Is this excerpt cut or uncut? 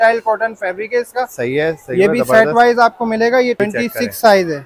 cut